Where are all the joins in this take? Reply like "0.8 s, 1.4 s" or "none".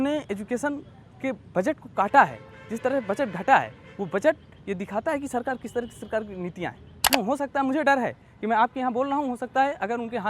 7.1 s